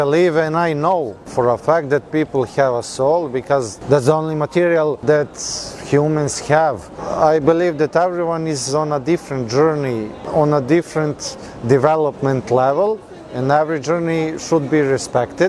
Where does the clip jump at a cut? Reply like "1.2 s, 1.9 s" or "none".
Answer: 1.2 s, 3.7 s, 5.0 s, 7.0 s, 10.2 s